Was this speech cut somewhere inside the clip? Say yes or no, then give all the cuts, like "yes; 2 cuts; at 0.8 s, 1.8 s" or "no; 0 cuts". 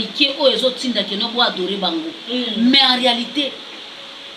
no; 0 cuts